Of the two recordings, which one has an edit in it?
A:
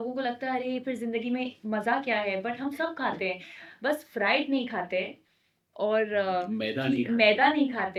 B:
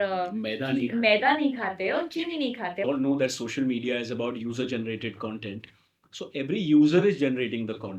B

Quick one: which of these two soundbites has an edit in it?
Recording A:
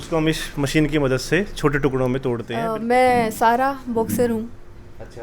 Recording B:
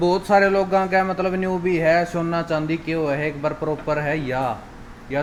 A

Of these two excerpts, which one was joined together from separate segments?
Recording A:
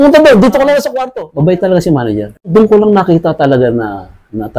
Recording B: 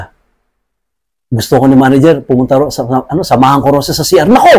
A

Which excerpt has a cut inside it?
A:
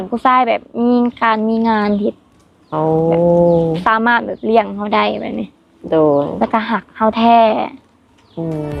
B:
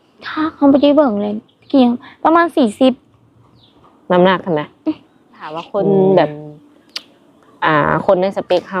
B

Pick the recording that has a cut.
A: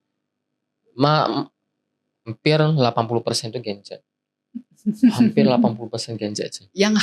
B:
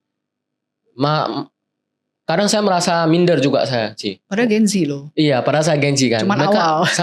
A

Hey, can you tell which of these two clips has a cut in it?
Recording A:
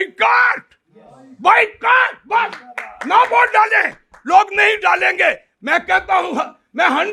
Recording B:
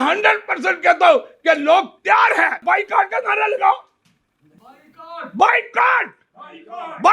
B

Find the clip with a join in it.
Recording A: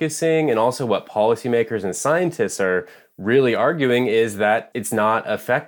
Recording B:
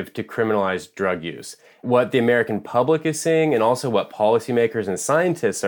B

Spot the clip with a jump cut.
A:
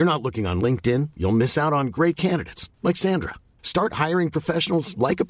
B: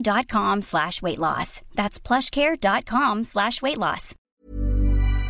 B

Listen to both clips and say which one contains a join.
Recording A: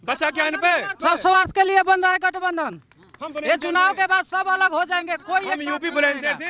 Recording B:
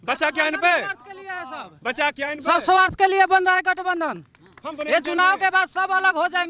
A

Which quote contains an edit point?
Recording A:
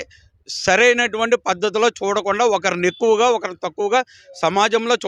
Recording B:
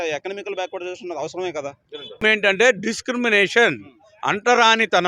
B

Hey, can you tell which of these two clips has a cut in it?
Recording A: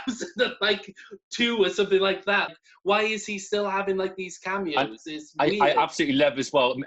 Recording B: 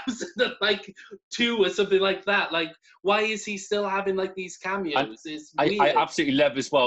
A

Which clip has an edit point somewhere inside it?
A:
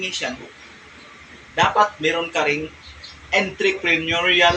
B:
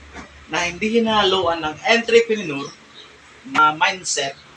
B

